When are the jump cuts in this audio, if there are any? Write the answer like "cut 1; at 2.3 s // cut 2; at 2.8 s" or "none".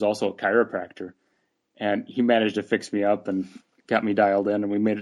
none